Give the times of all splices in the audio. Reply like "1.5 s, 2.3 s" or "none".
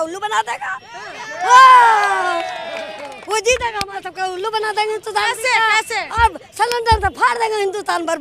none